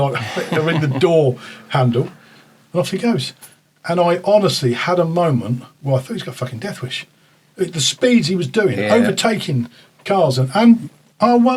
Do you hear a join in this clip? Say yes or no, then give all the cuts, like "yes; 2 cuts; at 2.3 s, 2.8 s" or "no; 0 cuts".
no; 0 cuts